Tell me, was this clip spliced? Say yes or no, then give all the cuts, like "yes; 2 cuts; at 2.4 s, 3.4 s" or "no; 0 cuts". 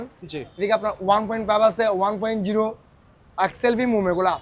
no; 0 cuts